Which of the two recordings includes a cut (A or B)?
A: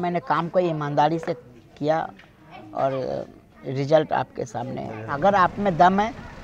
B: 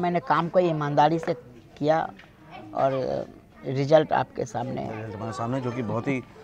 A